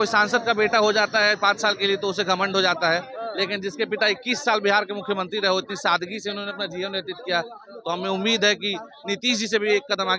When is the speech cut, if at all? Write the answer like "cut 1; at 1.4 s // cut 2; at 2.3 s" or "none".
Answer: none